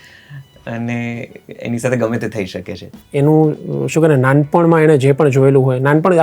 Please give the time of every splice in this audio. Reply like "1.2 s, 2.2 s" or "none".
3.0 s